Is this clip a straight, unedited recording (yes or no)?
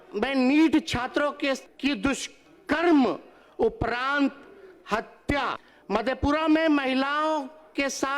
no